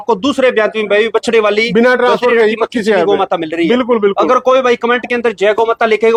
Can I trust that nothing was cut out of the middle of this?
yes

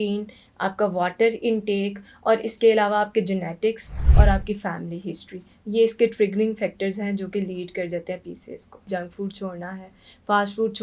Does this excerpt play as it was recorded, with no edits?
no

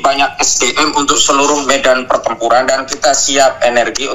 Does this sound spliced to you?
no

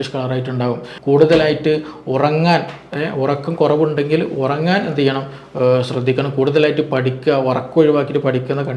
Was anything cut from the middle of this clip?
yes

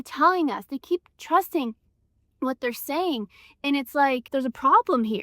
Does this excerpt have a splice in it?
yes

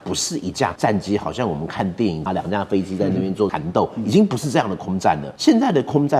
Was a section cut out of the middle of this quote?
yes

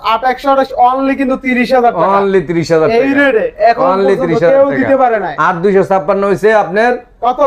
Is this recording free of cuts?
yes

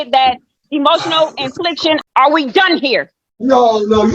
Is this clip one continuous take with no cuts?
no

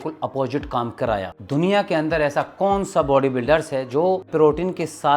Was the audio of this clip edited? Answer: yes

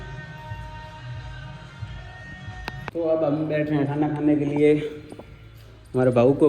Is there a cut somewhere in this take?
yes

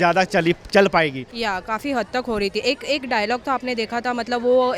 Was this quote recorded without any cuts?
no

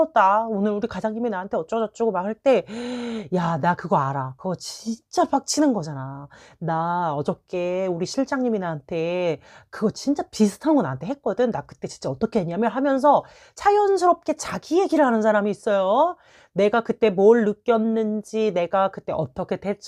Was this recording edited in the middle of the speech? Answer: no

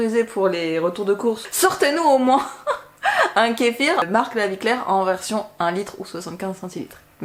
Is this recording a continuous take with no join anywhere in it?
no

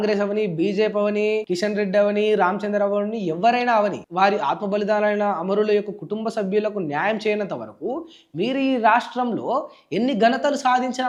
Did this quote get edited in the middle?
no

